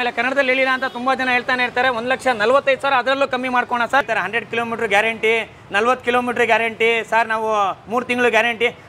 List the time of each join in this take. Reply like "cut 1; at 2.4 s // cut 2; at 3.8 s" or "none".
cut 1; at 4.0 s